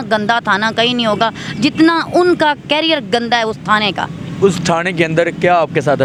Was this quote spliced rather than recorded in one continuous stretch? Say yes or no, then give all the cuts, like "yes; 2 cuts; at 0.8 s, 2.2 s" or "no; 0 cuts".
no; 0 cuts